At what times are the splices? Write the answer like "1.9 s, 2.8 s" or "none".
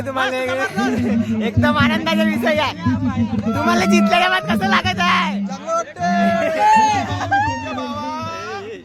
none

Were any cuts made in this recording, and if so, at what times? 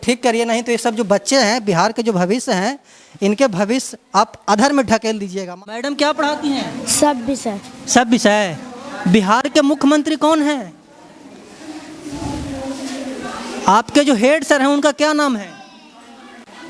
5.8 s

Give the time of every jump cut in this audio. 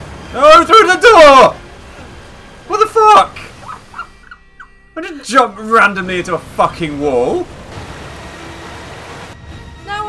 7.7 s

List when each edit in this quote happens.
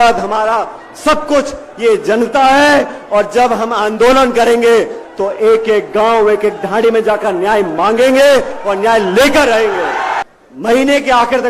10.2 s

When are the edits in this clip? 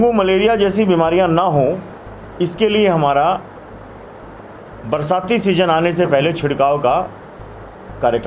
none

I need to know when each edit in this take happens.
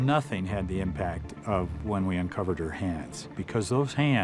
3.3 s

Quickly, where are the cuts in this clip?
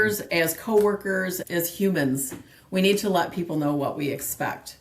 1.4 s

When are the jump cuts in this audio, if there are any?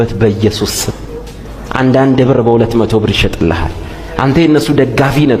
none

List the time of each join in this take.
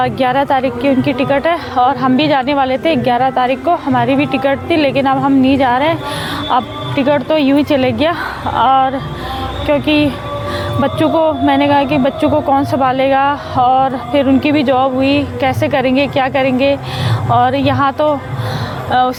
none

